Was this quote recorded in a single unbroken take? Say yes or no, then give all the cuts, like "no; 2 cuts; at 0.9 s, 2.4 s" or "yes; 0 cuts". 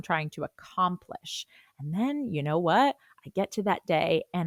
yes; 0 cuts